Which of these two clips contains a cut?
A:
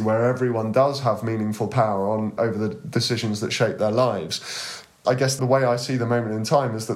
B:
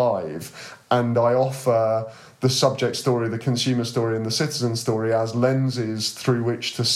A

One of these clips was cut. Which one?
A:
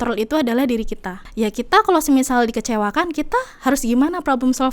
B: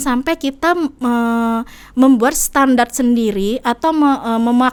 A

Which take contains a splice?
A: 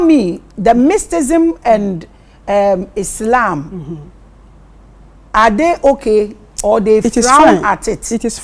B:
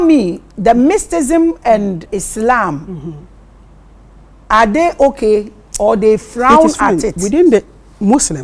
B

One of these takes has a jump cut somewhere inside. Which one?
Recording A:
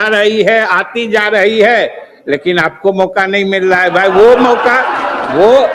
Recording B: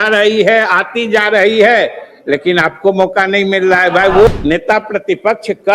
B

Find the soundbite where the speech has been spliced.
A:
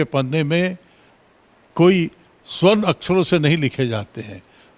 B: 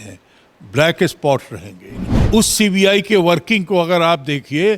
B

